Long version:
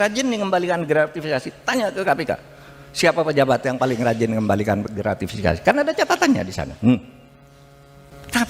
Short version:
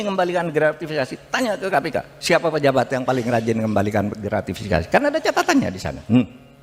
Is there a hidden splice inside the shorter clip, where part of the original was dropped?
yes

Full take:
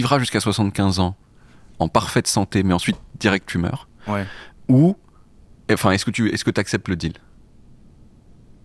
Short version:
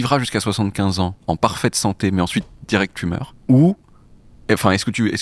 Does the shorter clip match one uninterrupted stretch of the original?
no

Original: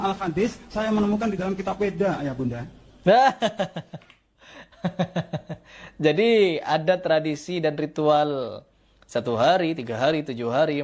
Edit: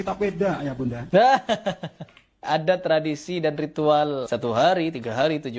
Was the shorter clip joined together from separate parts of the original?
yes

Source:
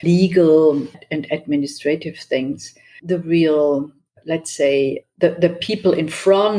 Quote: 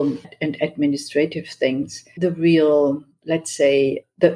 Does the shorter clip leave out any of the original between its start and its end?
yes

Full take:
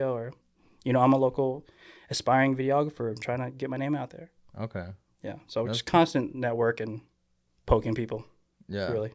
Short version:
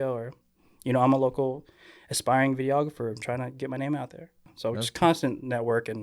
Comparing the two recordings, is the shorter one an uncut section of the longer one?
no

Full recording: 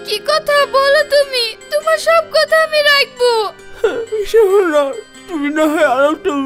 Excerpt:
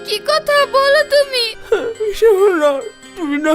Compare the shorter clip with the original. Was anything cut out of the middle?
yes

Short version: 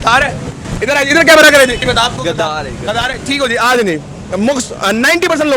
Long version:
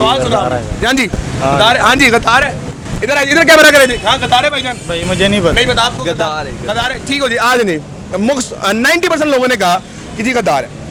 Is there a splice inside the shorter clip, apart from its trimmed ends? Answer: yes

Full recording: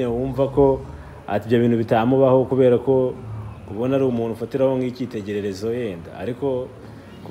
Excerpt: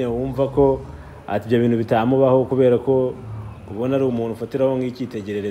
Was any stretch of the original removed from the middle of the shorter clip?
no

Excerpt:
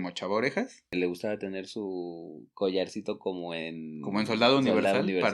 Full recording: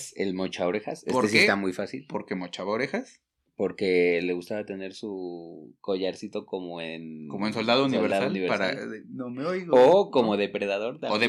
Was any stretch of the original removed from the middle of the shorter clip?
yes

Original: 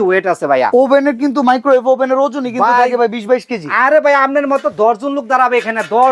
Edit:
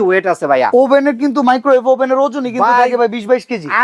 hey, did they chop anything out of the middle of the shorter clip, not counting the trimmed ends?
no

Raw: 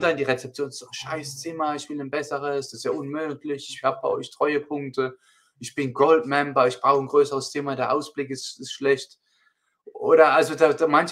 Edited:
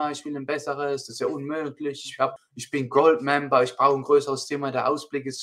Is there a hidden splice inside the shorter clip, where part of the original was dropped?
yes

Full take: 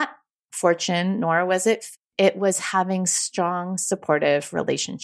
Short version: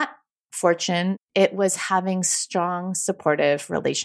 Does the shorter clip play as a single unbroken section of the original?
no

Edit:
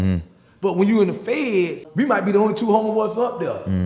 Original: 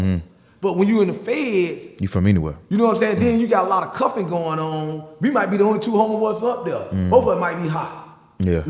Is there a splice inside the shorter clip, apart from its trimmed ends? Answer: yes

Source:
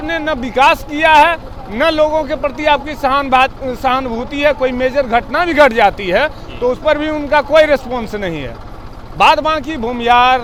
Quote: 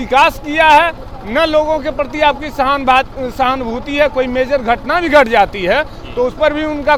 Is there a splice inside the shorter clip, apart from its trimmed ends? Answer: no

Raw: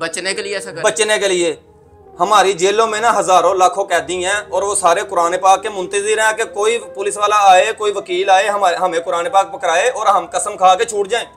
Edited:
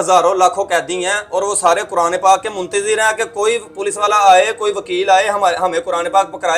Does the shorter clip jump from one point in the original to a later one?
no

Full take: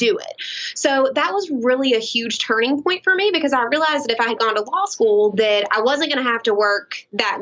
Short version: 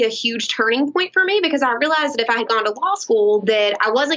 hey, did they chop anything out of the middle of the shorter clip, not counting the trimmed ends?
no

